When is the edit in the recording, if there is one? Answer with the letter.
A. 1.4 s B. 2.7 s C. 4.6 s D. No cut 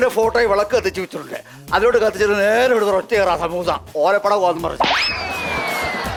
D